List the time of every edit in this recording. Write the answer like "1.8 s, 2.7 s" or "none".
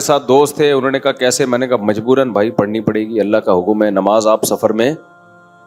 none